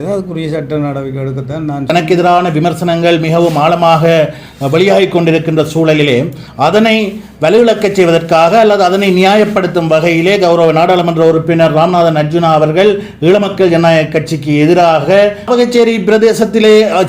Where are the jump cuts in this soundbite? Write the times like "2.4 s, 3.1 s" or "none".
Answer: 1.9 s, 15.5 s

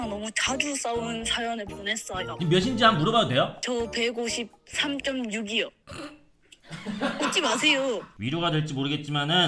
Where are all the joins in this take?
2.4 s, 8.1 s

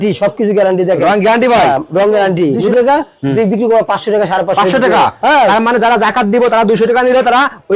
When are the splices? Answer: 2.6 s

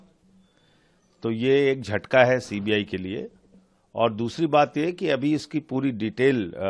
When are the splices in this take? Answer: none

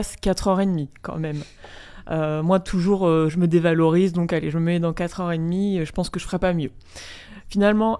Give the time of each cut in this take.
none

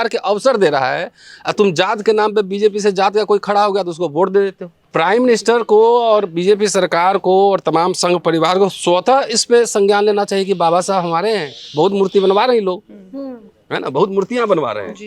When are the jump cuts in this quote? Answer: 4.9 s

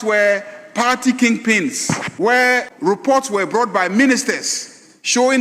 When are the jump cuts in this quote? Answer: 2.1 s, 2.7 s

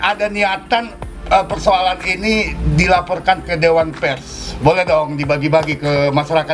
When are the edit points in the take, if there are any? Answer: none

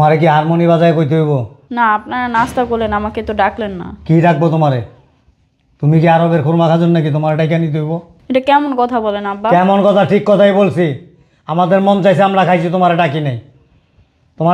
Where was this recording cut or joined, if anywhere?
1.6 s, 8.1 s

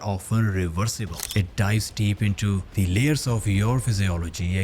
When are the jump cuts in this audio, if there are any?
1.1 s, 2.7 s

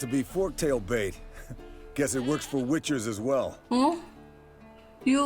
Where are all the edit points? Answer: 3.6 s

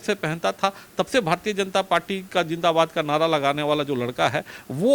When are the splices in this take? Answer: none

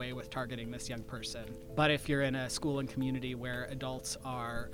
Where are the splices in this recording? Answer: 1.6 s

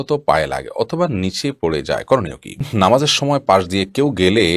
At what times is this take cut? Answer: 2.6 s

